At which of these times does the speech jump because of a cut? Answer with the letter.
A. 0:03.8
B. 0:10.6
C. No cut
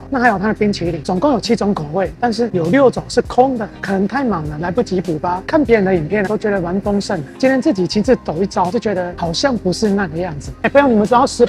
B